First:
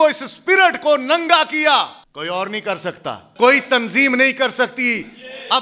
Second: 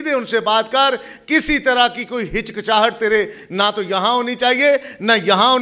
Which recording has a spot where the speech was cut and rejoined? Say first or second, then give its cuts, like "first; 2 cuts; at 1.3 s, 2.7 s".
first; 2 cuts; at 2.0 s, 3.3 s